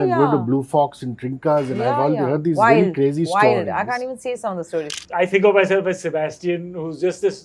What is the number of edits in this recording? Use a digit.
1